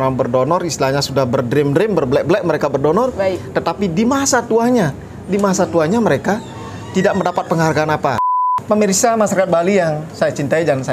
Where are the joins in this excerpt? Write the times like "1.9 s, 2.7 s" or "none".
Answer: 8.2 s